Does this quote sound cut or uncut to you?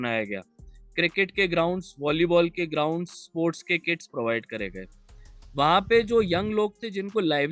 uncut